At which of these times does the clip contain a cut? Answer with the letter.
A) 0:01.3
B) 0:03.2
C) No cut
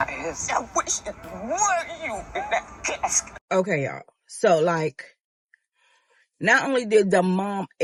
C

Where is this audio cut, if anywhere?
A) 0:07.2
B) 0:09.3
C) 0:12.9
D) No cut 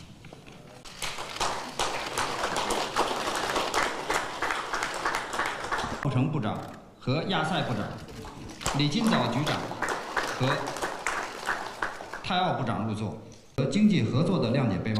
C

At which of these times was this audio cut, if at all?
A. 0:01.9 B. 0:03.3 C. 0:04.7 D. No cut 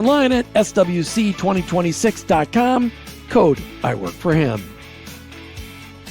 C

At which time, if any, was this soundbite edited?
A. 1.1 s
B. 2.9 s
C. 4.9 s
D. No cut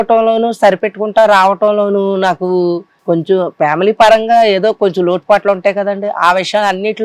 B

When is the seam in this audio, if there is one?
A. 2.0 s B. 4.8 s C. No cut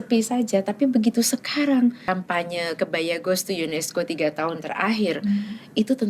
A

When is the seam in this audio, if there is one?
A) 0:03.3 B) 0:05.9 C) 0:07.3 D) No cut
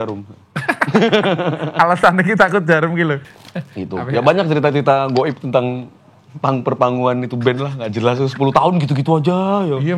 A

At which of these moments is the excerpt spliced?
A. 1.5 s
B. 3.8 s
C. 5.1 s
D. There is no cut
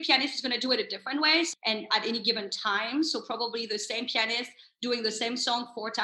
A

